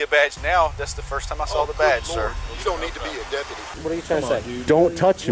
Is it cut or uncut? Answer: cut